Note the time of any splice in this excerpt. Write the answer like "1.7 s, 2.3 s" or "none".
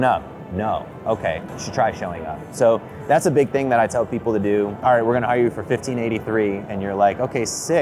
1.5 s, 4.8 s